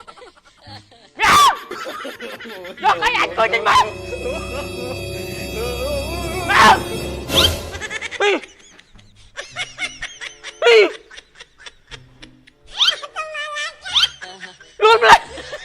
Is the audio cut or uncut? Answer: cut